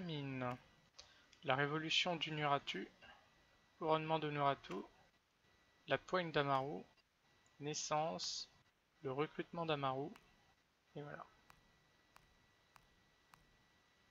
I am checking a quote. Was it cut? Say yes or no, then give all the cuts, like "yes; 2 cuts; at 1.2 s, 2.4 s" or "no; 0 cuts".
no; 0 cuts